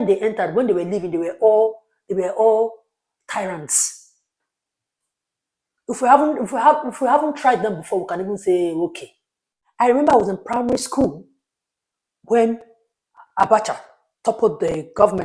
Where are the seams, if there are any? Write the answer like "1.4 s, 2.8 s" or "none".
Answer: 9.6 s